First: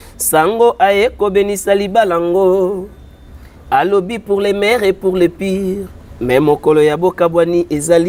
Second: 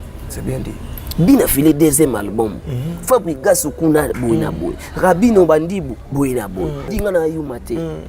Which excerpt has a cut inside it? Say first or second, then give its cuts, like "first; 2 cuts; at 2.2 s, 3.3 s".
second; 1 cut; at 6.9 s